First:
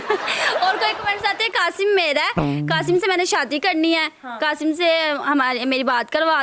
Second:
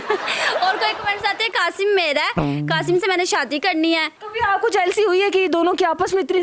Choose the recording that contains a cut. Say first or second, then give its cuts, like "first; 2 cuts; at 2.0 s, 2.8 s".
second; 1 cut; at 4.2 s